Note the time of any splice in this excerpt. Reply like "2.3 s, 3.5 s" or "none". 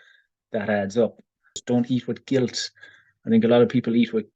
1.6 s